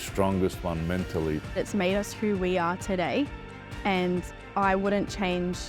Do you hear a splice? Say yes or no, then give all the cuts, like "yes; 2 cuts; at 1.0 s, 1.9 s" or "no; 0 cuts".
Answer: no; 0 cuts